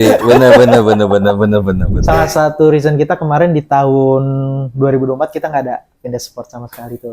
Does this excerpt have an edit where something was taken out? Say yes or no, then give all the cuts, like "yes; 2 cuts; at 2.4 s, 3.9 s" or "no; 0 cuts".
yes; 1 cut; at 2.0 s